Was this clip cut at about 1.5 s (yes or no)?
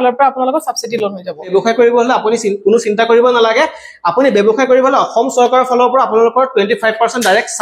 yes